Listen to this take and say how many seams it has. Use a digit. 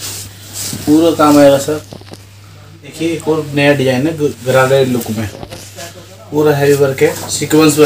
1